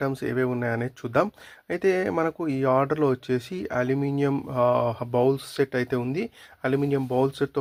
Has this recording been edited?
no; 0 cuts

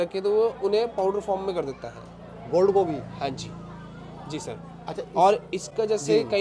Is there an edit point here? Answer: no; 0 cuts

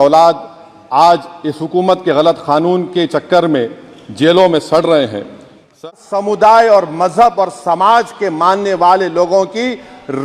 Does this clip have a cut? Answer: yes; 1 cut; at 5.9 s

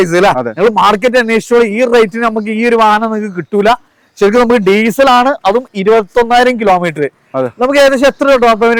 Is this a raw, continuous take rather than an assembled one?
yes; 0 cuts

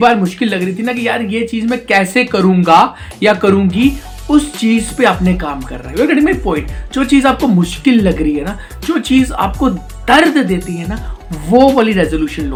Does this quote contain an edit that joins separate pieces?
no; 0 cuts

